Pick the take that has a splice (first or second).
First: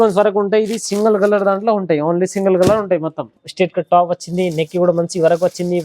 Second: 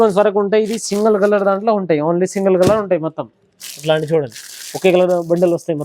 first